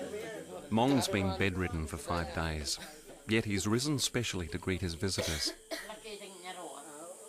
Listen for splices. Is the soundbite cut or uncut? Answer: cut